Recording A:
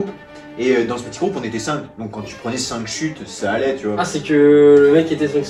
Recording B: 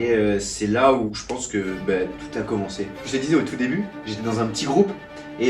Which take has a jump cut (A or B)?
B